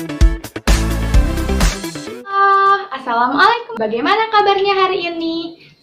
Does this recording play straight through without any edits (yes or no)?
no